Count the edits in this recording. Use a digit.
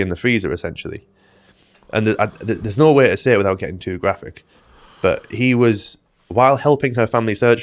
0